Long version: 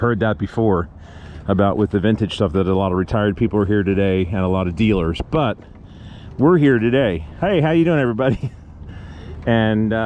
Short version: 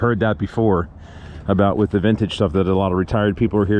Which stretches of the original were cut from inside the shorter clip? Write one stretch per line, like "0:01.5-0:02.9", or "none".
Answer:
none